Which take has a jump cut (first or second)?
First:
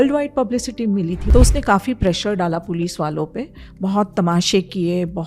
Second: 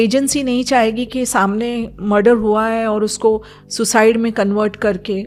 first